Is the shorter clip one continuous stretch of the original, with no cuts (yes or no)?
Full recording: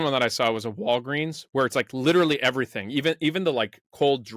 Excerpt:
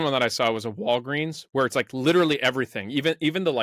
yes